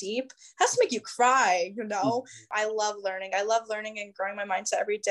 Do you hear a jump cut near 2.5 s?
yes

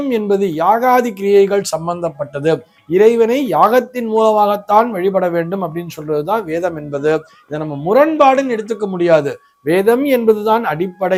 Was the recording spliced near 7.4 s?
no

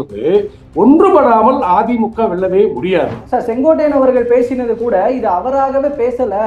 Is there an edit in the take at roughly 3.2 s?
yes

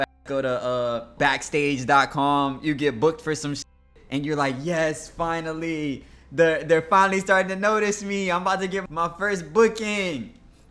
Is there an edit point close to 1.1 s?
yes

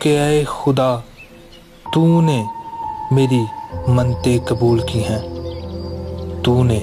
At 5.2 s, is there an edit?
no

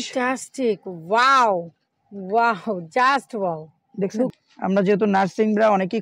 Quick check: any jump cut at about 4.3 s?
yes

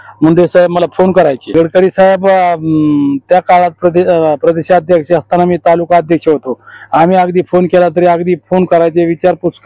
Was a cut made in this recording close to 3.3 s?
no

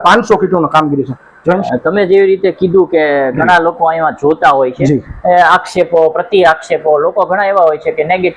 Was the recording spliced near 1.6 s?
yes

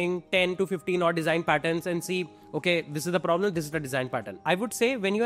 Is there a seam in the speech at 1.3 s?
no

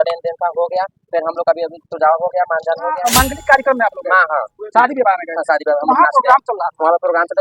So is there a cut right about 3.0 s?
yes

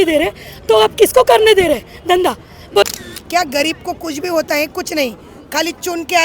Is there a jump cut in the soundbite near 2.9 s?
yes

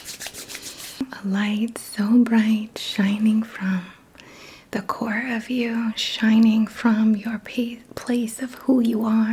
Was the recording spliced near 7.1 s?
no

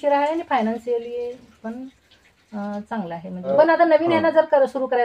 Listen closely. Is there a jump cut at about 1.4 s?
no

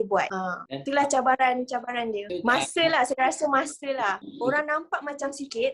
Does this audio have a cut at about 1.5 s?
no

